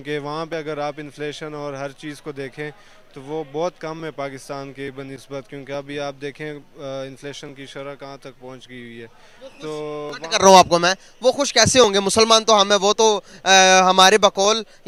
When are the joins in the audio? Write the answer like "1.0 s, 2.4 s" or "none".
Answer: none